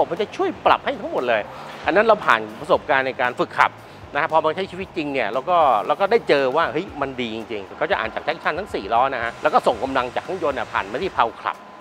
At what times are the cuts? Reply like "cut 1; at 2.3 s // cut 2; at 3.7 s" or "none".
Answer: none